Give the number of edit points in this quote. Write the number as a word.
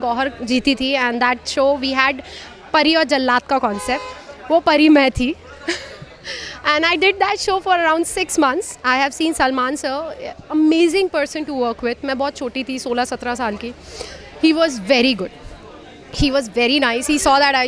zero